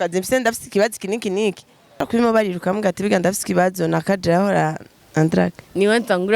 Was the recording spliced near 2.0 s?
yes; 1 cut; at 2.0 s

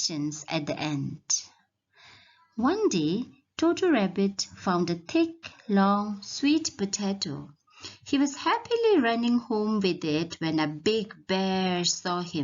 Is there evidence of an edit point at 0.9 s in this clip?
no; 1 cut; at 9.5 s

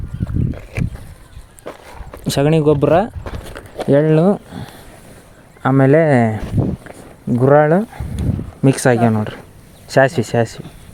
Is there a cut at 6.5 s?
no; 0 cuts

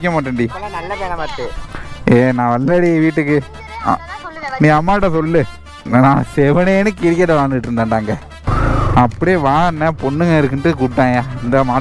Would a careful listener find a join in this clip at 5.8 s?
yes; 2 cuts; at 5.8 s, 8.4 s

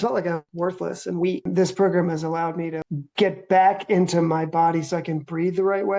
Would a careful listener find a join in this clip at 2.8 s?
yes; 2 cuts; at 1.5 s, 2.8 s

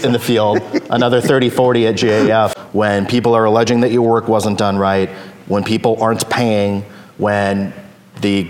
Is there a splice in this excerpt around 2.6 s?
yes; 1 cut; at 2.6 s

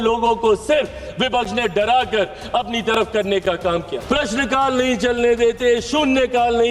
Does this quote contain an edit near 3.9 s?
yes; 1 cut; at 3.9 s

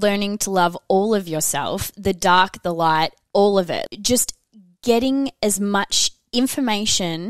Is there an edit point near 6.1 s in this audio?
no; 1 cut; at 3.8 s

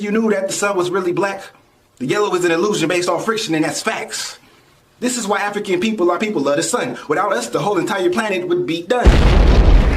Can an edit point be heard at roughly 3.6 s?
no; 1 cut; at 9.1 s

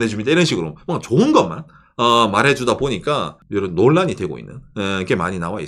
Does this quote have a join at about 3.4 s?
yes; 1 cut; at 3.4 s

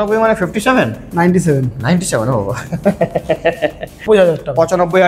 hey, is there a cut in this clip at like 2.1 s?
no; 1 cut; at 4.0 s

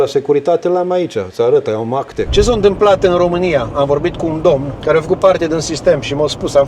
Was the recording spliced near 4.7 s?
yes; 2 cuts; at 2.2 s, 4.7 s

